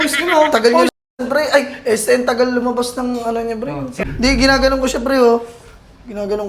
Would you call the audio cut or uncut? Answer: cut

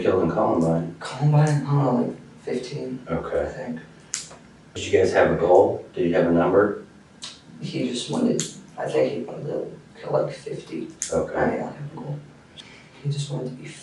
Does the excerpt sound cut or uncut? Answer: cut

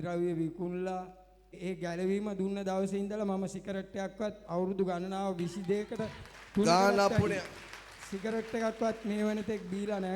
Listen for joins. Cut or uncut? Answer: cut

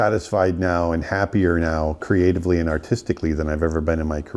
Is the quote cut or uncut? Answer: uncut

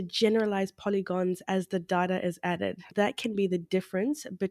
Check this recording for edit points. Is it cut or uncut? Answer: cut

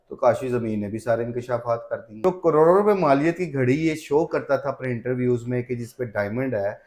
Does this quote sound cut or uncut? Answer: cut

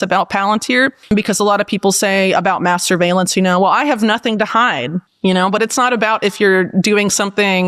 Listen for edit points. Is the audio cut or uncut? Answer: uncut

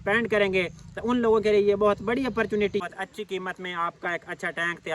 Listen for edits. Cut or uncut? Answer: cut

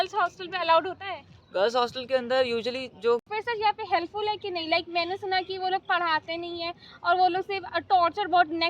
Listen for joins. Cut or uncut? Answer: cut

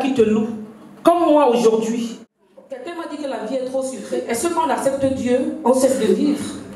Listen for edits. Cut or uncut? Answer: cut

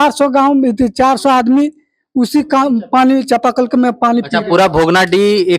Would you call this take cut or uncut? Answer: cut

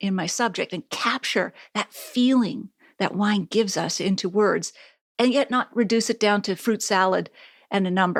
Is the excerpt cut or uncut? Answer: uncut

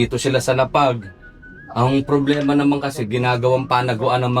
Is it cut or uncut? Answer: uncut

